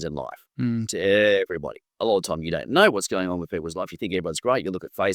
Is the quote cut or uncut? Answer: uncut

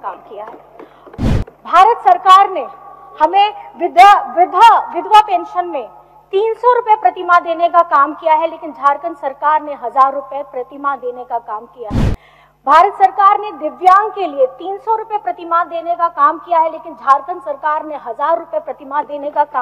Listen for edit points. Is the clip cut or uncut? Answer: uncut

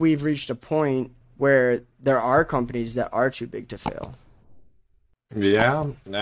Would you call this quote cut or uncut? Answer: cut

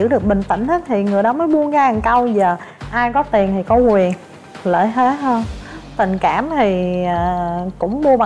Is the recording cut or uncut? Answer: uncut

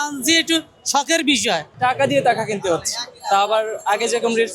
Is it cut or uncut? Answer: cut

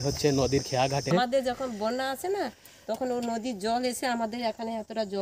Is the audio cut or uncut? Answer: cut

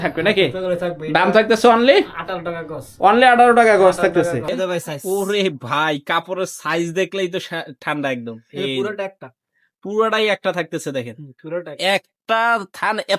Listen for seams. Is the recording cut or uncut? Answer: cut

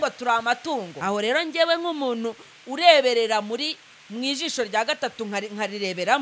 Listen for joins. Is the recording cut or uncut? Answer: cut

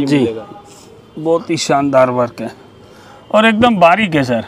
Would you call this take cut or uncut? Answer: uncut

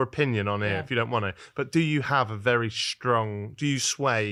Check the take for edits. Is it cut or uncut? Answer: uncut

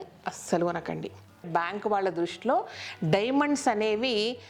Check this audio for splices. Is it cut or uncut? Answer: cut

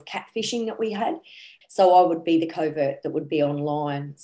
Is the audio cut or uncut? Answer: cut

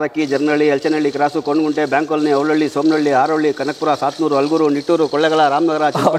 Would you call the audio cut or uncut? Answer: uncut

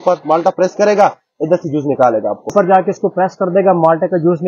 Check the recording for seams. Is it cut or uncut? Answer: cut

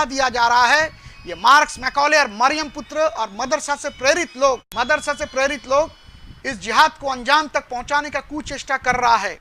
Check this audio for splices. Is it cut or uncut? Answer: cut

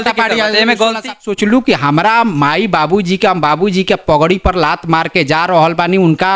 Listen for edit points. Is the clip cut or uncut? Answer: cut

